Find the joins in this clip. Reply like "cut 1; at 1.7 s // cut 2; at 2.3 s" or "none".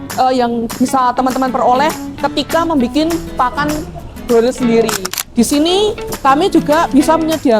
cut 1; at 5.0 s

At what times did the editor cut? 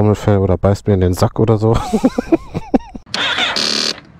cut 1; at 3.0 s

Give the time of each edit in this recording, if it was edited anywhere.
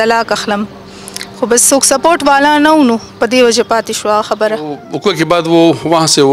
cut 1; at 4.9 s

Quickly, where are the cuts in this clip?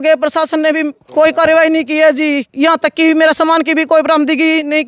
cut 1; at 1.0 s // cut 2; at 2.5 s

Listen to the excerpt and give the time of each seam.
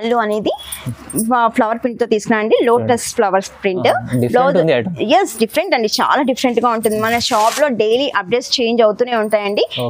none

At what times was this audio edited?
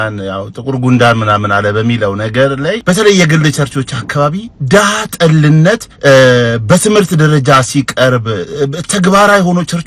cut 1; at 2.8 s // cut 2; at 5.9 s

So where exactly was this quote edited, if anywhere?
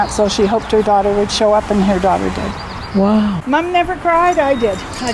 cut 1; at 3.4 s

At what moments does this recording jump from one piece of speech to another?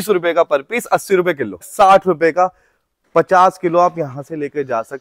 cut 1; at 1.7 s

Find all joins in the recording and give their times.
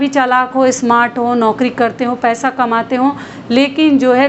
none

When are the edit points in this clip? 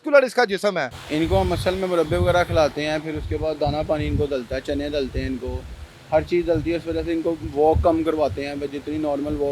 cut 1; at 0.9 s

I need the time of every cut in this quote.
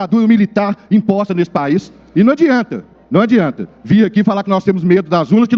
cut 1; at 2.0 s

